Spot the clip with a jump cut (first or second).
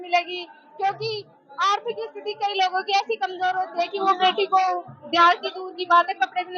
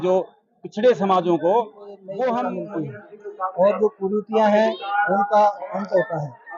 second